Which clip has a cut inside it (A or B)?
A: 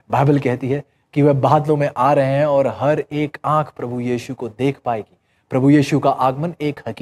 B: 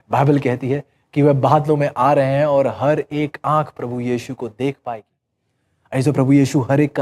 B